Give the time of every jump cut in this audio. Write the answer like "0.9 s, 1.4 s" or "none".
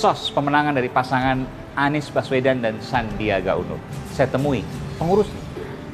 none